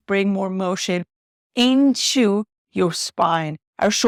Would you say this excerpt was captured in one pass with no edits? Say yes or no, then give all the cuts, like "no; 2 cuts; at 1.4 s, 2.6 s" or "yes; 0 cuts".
yes; 0 cuts